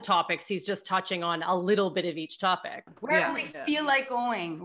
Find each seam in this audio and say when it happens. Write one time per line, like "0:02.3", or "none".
0:02.9